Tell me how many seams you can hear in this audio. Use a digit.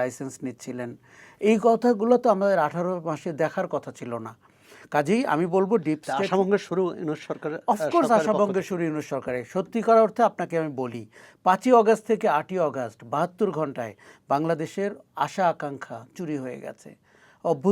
0